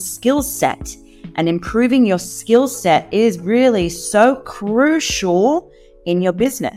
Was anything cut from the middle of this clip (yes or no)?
no